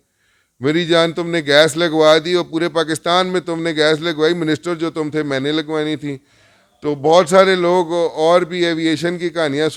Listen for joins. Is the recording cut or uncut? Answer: uncut